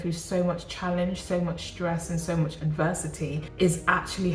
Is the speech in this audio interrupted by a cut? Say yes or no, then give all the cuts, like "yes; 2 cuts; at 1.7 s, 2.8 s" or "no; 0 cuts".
yes; 1 cut; at 3.4 s